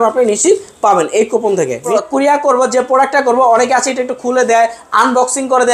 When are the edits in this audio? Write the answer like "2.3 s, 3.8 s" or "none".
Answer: 1.9 s

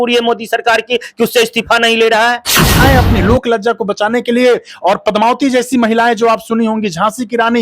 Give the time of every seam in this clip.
2.8 s

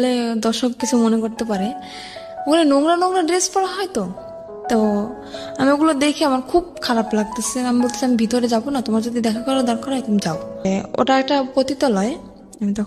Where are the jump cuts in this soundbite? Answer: 10.6 s

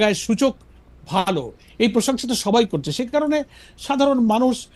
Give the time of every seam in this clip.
none

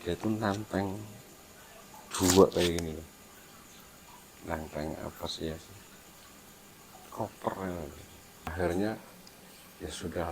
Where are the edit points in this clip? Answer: 8.5 s

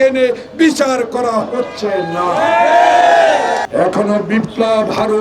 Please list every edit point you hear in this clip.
3.6 s

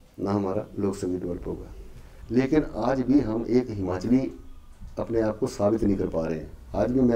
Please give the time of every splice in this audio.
2.1 s

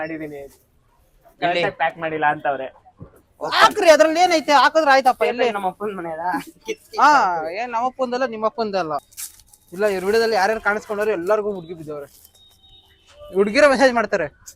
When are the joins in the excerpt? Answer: 9.0 s

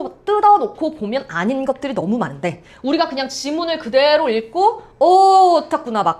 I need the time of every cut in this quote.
none

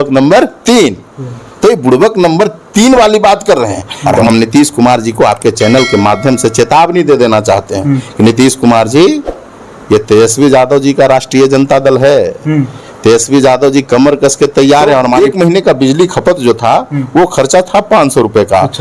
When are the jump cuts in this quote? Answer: 4.2 s, 15.2 s

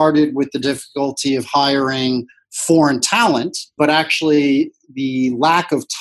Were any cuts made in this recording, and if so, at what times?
3.6 s

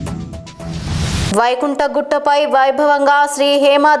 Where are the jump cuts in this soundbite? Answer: 1.3 s

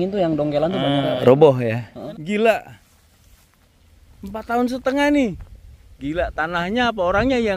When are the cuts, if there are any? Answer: 2.0 s

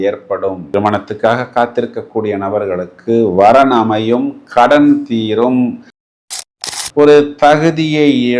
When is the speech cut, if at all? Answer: 6.3 s

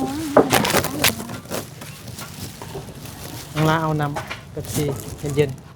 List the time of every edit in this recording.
none

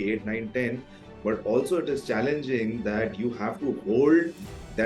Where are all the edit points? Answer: none

